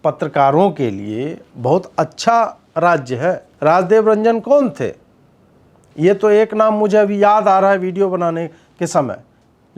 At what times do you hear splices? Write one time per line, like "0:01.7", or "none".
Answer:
0:03.5